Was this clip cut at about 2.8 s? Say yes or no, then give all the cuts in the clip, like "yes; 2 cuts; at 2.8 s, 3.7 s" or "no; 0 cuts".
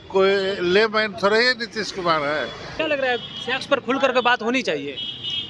yes; 1 cut; at 2.8 s